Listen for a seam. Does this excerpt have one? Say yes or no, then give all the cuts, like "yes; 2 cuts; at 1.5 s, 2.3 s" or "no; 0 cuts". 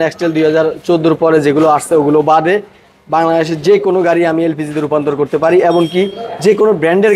no; 0 cuts